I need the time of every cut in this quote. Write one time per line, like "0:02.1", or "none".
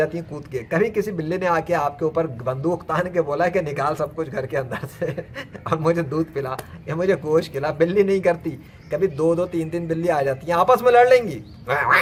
none